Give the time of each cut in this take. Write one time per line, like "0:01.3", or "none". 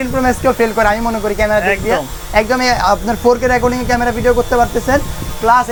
none